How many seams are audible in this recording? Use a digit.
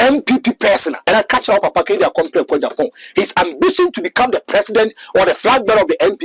1